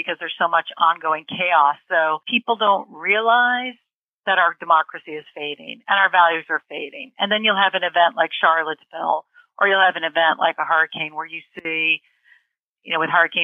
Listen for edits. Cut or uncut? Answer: cut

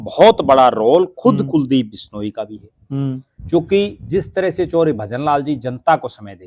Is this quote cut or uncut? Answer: uncut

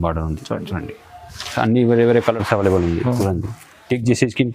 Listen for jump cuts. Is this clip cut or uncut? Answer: cut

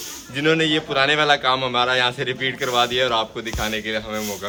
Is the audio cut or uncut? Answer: uncut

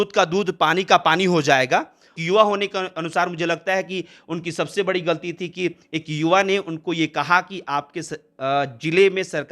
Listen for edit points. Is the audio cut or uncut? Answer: cut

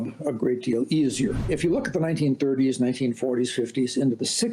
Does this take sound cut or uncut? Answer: cut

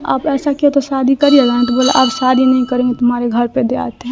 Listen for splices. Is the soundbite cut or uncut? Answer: uncut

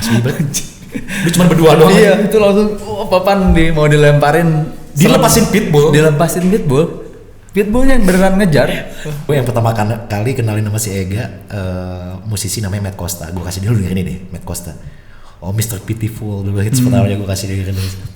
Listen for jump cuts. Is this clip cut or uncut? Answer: cut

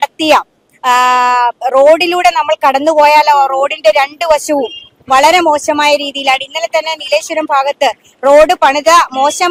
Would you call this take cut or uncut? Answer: uncut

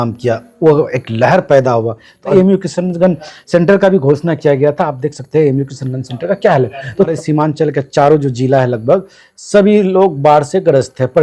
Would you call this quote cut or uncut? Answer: cut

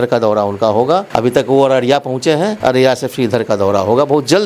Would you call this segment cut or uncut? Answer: cut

